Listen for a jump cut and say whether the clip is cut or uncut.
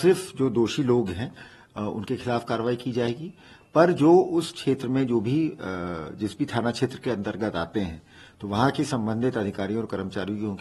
uncut